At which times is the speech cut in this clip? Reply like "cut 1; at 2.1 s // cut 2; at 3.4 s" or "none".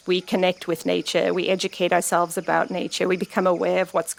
none